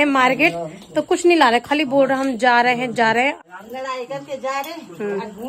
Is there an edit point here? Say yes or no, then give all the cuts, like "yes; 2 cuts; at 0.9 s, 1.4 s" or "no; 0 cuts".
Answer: yes; 1 cut; at 3.4 s